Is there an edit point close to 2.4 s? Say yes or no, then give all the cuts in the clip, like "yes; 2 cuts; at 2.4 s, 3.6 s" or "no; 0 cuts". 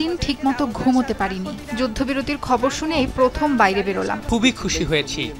no; 1 cut; at 4.2 s